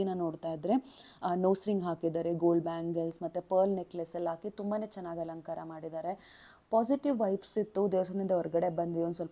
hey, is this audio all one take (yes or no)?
yes